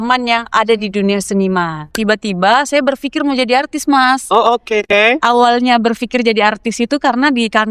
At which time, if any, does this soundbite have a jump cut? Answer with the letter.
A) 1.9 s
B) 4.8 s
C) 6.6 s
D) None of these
A